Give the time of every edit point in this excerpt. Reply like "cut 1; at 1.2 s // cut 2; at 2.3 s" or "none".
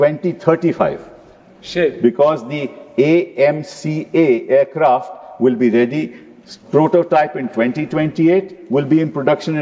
none